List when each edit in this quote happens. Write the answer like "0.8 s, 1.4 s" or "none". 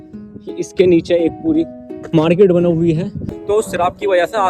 3.3 s